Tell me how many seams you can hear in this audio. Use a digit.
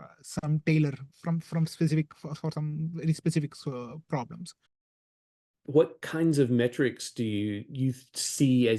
1